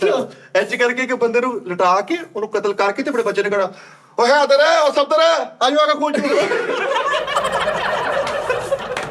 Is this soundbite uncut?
yes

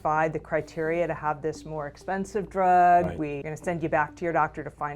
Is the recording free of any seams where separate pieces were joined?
no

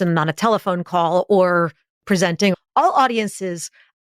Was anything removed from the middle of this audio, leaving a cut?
yes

